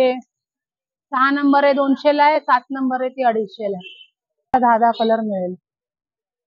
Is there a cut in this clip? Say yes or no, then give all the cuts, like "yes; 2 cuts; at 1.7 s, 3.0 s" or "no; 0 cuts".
yes; 1 cut; at 4.5 s